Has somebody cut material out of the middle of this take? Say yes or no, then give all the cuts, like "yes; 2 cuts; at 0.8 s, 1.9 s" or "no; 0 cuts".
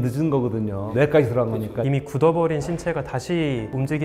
yes; 1 cut; at 1.8 s